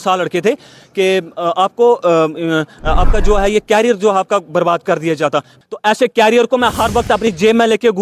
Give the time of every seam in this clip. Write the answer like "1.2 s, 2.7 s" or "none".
5.5 s